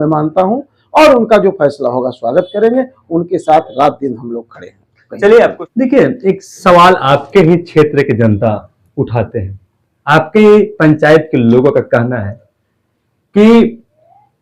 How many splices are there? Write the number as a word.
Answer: one